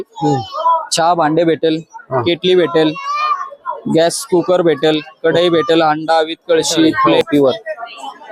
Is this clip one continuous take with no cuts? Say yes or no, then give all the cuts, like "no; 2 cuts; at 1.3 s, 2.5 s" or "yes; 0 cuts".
no; 1 cut; at 7.1 s